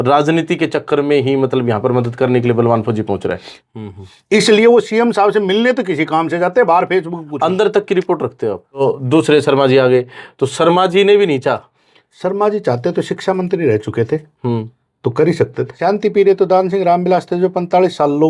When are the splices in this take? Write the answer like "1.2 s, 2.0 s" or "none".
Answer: 3.5 s, 8.8 s, 15.7 s